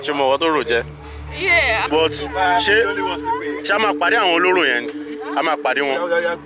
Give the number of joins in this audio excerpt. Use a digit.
1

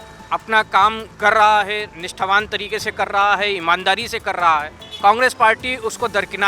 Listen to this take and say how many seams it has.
0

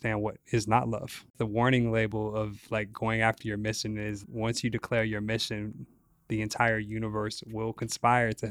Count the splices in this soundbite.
2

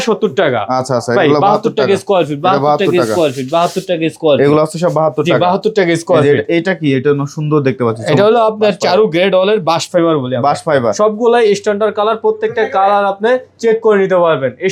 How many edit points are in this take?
0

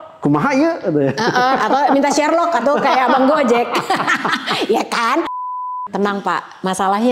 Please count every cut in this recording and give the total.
1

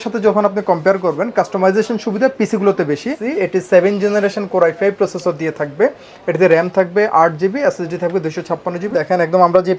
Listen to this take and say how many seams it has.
2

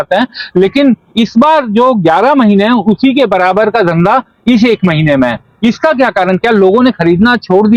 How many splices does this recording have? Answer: 0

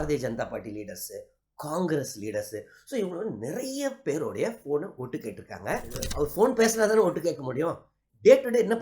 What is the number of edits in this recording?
1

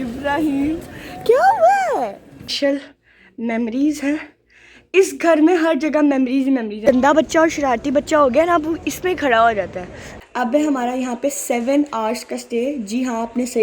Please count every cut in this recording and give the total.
3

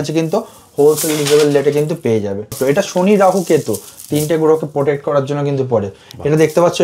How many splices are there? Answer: 1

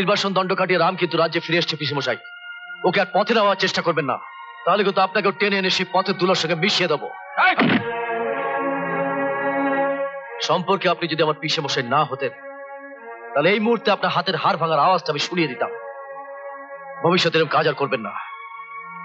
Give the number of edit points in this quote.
0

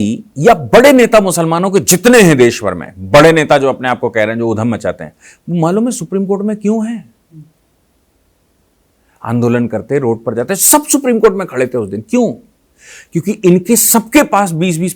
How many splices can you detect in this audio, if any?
0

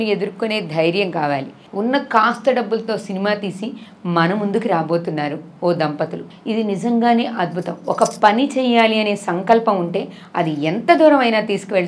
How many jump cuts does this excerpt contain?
2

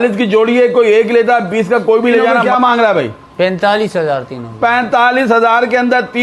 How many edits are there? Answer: 1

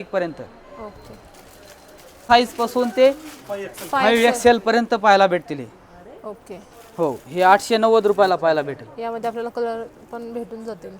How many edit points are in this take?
1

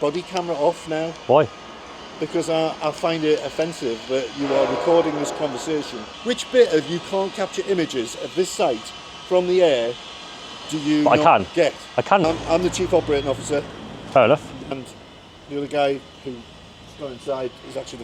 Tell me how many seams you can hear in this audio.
3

